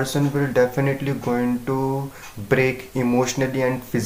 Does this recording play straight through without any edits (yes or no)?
yes